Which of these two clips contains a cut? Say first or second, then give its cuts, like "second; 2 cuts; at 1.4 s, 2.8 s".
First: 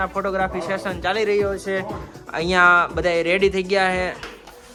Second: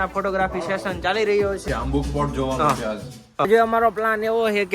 second; 2 cuts; at 1.6 s, 3.4 s